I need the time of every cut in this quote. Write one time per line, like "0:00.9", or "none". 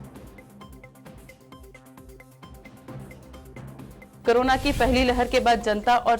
none